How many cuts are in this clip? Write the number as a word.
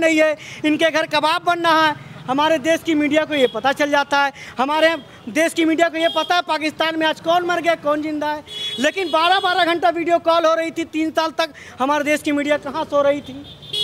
zero